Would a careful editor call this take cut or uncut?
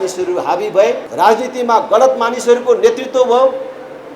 cut